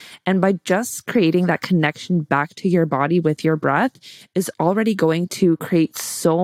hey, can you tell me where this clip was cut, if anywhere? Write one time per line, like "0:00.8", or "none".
0:04.5